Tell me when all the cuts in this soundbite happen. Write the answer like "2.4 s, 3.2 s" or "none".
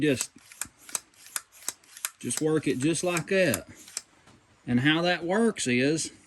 none